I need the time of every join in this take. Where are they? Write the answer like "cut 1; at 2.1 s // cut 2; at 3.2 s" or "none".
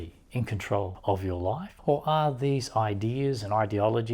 cut 1; at 0.9 s // cut 2; at 1.7 s